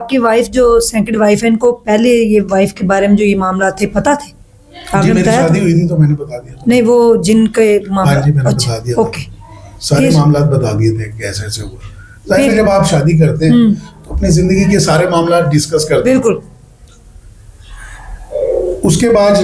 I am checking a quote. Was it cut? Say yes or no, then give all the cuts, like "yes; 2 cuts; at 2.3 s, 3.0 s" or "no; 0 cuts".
no; 0 cuts